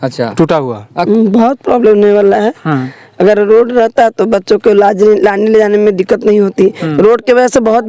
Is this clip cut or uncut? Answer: cut